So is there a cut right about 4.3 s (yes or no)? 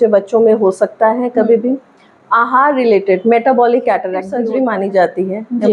yes